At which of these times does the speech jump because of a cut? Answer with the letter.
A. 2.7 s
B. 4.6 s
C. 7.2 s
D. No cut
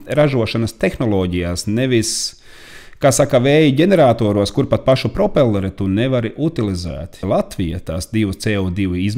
C